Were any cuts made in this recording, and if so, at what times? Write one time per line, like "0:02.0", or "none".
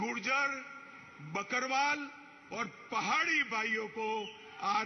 none